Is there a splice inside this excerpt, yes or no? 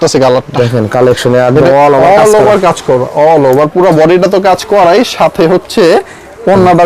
no